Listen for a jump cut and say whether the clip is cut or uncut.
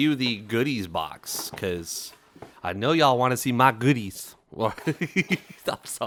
uncut